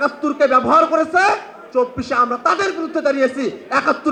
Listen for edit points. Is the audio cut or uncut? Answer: uncut